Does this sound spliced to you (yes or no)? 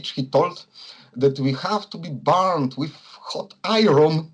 no